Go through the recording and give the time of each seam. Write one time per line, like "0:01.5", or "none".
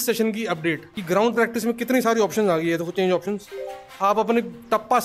0:00.9